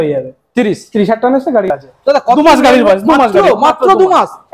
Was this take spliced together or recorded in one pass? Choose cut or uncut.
cut